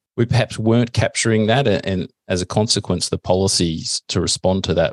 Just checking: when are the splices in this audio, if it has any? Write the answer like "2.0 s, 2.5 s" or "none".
none